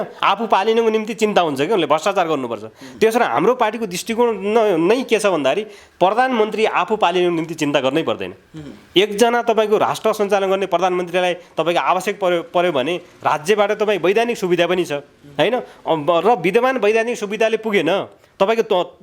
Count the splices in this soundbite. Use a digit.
0